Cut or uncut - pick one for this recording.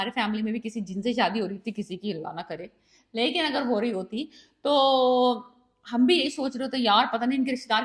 uncut